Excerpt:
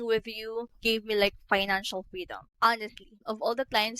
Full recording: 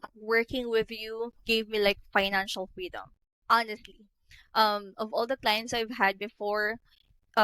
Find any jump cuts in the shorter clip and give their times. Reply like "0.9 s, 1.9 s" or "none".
2.4 s, 3.2 s